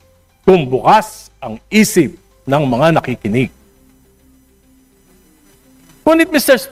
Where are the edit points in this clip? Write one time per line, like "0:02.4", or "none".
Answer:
none

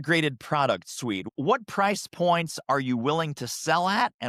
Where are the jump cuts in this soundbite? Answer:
0:01.2

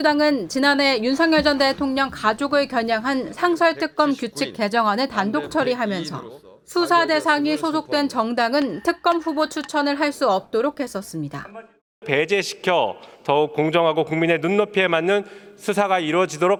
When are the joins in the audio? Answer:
none

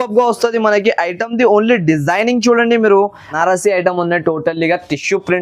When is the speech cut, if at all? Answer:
0:03.3

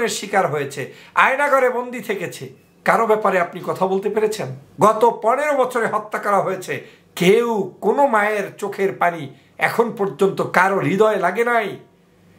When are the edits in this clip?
0:04.6

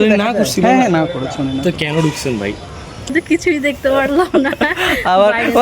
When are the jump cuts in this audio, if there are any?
0:03.1

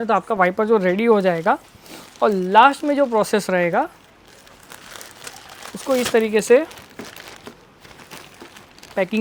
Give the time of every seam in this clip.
none

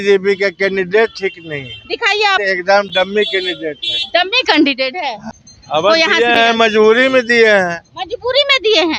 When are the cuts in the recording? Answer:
0:02.4
0:05.2

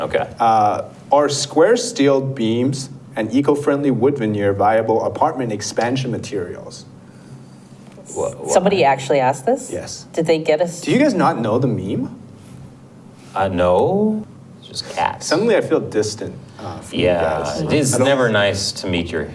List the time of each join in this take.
0:14.2

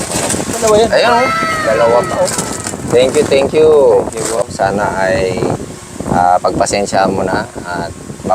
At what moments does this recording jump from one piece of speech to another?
0:04.4

